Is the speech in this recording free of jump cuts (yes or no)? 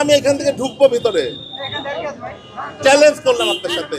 yes